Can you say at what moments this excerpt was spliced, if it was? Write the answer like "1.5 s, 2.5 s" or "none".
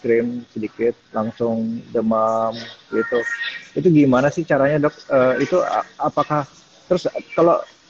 none